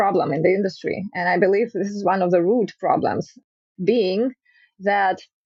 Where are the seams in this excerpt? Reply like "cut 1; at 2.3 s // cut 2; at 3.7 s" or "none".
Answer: none